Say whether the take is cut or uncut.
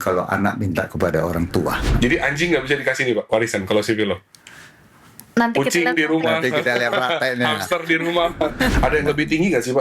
cut